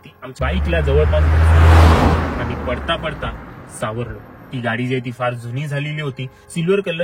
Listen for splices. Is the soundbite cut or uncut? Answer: uncut